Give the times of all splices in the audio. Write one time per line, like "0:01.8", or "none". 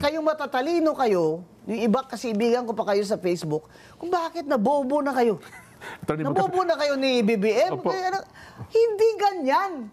none